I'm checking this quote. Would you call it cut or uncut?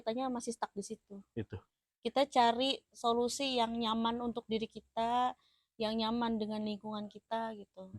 uncut